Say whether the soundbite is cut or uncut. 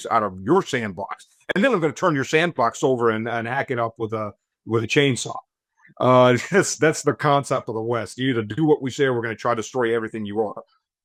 uncut